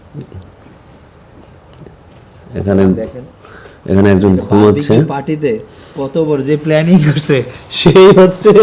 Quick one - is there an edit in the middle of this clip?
no; 0 cuts

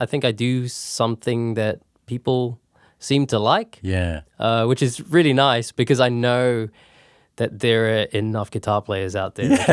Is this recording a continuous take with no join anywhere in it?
yes; 0 cuts

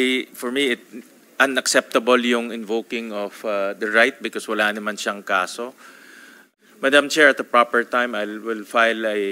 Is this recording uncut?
no; 1 cut; at 6.4 s

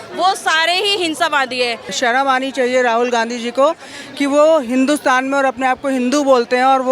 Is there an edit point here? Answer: yes; 1 cut; at 1.9 s

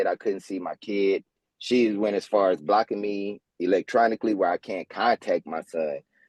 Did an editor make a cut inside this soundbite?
no; 0 cuts

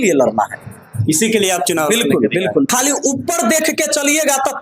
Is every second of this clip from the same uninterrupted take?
no; 1 cut; at 2.7 s

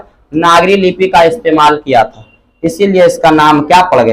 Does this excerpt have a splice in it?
no; 0 cuts

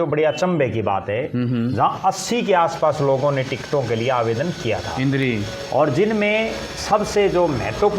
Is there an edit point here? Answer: no; 0 cuts

